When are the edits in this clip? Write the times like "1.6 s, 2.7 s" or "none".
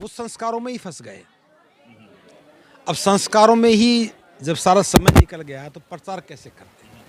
none

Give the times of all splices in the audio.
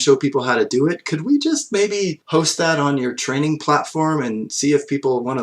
2.2 s, 4.5 s

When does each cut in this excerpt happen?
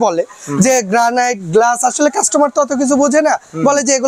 none

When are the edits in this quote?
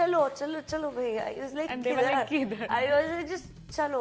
none

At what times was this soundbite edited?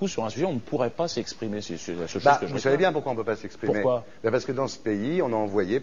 3.8 s

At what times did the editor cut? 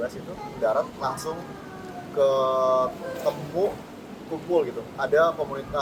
none

